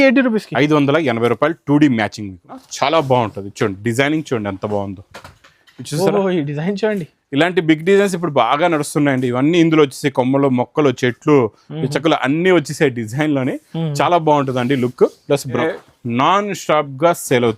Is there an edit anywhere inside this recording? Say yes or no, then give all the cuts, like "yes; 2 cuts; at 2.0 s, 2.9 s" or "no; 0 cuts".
yes; 2 cuts; at 2.6 s, 15.6 s